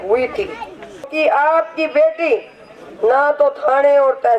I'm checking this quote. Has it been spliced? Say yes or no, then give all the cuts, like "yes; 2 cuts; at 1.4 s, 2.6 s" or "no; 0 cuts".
yes; 1 cut; at 1.1 s